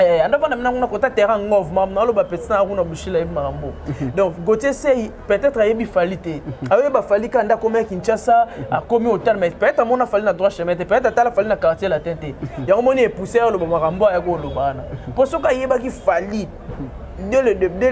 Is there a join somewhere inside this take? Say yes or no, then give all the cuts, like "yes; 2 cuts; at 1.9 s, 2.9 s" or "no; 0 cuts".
no; 0 cuts